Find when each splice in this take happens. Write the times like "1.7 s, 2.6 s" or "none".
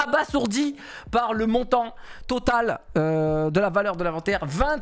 none